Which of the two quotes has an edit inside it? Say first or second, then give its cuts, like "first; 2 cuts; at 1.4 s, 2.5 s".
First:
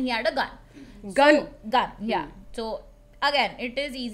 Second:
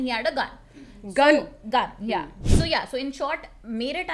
second; 1 cut; at 2.4 s